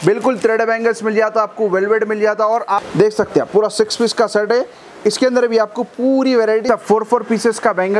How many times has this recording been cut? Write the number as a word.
two